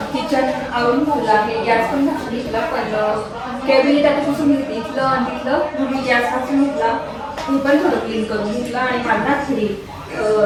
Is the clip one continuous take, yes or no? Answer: yes